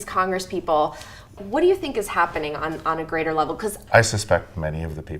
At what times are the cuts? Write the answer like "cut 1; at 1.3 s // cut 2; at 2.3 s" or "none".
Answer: cut 1; at 1.4 s // cut 2; at 3.8 s